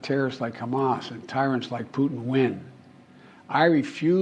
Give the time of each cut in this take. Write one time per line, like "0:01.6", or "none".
0:02.5